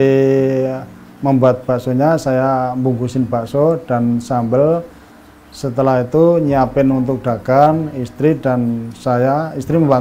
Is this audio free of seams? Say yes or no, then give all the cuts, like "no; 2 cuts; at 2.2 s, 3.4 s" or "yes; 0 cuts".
yes; 0 cuts